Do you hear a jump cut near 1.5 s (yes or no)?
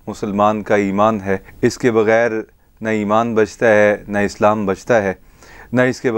yes